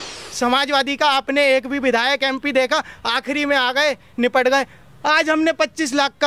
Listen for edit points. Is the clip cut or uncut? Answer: uncut